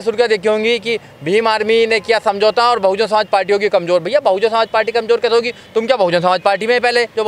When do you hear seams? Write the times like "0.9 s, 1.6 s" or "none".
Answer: none